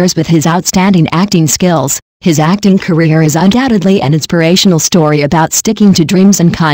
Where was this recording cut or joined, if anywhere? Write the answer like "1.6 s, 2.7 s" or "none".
2.2 s